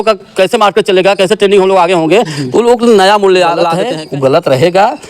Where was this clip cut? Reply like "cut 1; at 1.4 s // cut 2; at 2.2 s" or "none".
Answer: cut 1; at 3.8 s